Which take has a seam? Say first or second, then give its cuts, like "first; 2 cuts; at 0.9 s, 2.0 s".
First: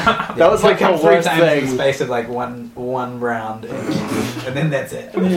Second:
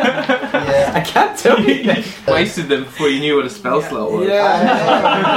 second; 1 cut; at 2.2 s